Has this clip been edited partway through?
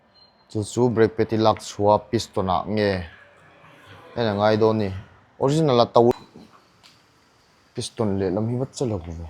yes; 1 cut; at 6.1 s

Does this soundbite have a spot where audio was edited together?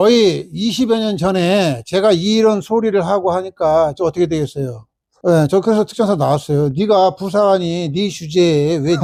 no; 0 cuts

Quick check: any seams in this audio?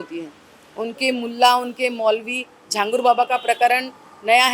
no; 0 cuts

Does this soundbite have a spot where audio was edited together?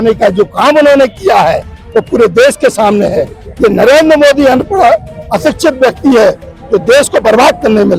no; 0 cuts

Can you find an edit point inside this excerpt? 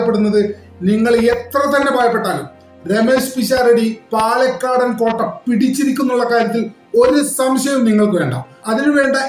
no; 0 cuts

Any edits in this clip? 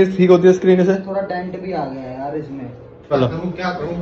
yes; 1 cut; at 3.1 s

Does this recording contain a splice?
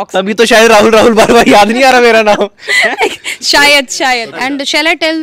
yes; 1 cut; at 4.3 s

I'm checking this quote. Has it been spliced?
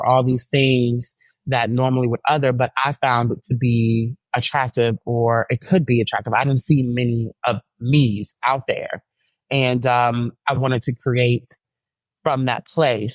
no; 0 cuts

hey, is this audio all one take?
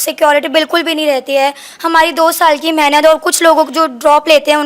yes; 0 cuts

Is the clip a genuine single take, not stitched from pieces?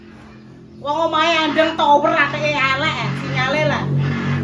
yes; 0 cuts

